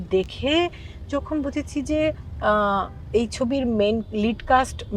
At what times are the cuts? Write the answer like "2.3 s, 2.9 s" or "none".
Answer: none